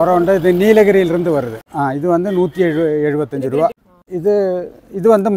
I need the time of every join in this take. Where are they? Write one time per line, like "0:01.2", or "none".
none